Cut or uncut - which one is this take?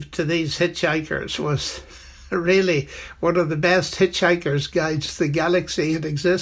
uncut